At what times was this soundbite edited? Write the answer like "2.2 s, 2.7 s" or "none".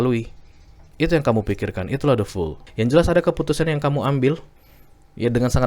2.6 s

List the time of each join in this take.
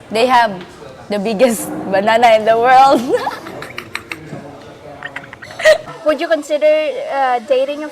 5.9 s

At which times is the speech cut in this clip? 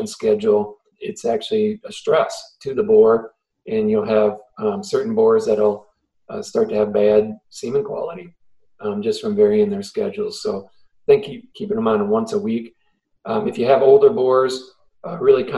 0.9 s

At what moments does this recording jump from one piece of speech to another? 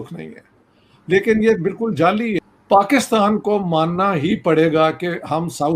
2.4 s

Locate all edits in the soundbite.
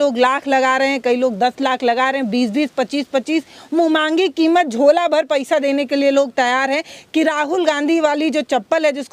none

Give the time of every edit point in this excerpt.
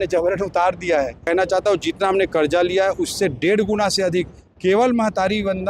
1.3 s

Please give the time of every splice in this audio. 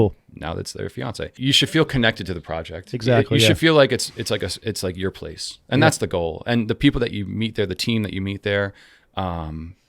1.3 s

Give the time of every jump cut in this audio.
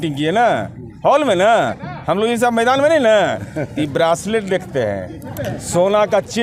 none

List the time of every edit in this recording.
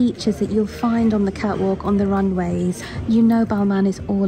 2.9 s

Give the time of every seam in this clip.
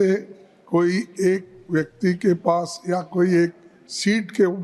none

